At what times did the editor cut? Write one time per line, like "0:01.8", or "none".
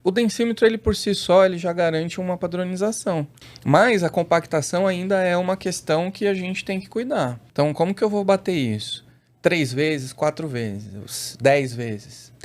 0:03.5
0:07.4

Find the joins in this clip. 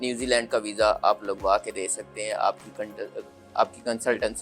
none

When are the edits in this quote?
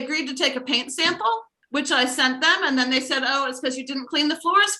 0:01.6

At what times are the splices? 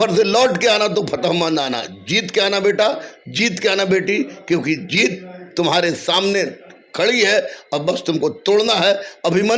none

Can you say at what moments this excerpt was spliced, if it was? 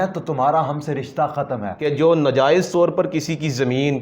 0:01.8

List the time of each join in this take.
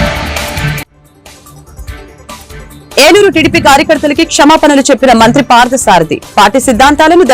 0:02.4

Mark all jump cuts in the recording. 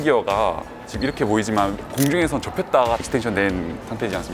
0:03.0

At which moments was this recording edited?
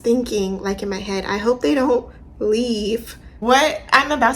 0:03.4

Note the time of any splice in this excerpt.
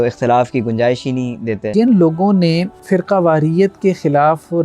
0:01.7
0:02.7

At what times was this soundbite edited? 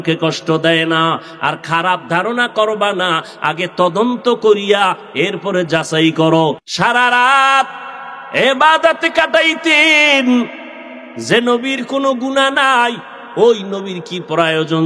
0:06.7

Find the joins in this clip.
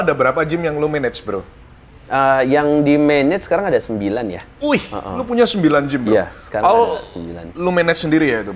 none

